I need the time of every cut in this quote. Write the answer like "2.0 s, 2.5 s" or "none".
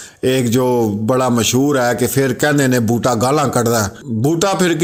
none